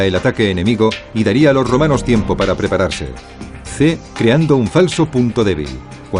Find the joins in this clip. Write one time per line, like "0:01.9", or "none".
0:01.0